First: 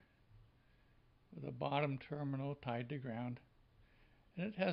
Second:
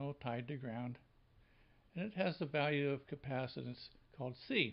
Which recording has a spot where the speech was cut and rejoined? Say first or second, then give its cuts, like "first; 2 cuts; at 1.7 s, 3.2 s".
first; 1 cut; at 1.5 s